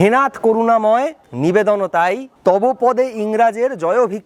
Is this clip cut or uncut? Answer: cut